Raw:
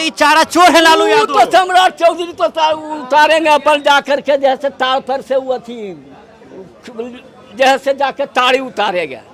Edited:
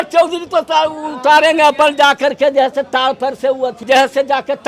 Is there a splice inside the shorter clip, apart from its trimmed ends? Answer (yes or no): yes